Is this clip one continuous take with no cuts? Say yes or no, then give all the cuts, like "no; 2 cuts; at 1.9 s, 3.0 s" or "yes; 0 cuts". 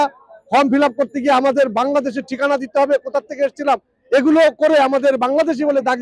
yes; 0 cuts